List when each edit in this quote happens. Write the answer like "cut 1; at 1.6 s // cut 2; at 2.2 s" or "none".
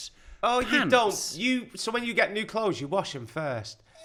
none